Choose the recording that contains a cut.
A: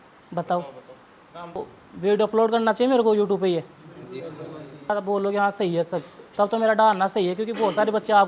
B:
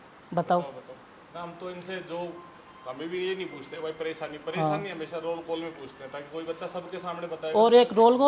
A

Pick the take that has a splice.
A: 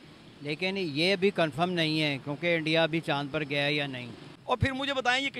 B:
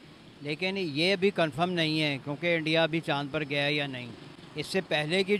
A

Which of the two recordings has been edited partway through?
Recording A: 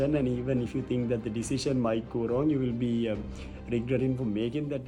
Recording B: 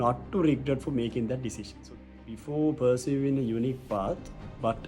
B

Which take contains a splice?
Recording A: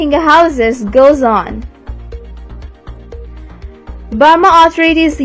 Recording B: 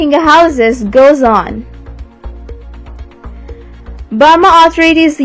B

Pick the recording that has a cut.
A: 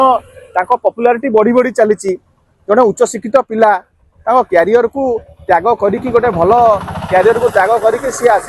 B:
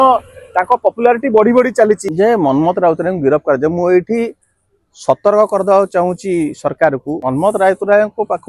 B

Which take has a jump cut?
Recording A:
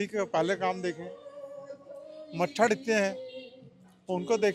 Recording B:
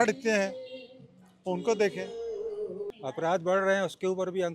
B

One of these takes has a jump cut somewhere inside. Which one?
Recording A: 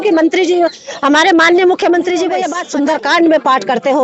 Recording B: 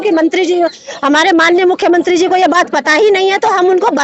A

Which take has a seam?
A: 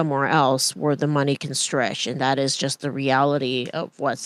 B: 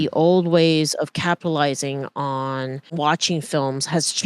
B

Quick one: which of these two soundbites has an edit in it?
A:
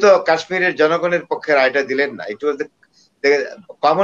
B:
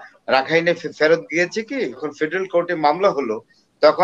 B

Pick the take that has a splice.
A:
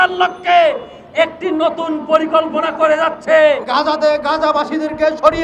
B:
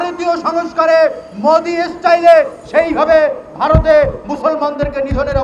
A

